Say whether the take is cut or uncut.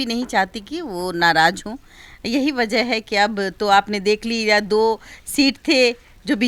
uncut